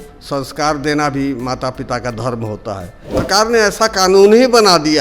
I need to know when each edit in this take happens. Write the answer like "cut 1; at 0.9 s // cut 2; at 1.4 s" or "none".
cut 1; at 3.3 s

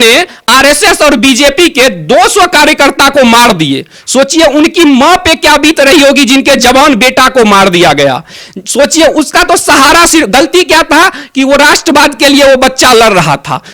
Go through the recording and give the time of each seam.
none

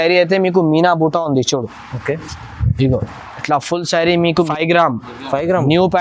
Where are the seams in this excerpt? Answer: cut 1; at 4.4 s

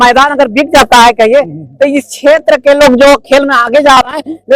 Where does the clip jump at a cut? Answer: none

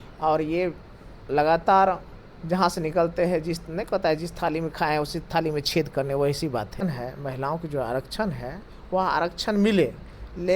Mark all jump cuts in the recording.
cut 1; at 6.8 s

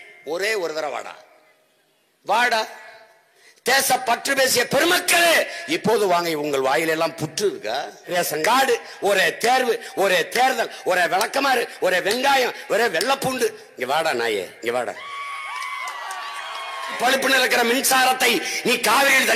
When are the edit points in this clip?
cut 1; at 8.1 s // cut 2; at 17.0 s

